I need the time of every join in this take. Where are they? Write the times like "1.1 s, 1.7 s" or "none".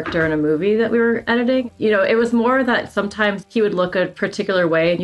1.7 s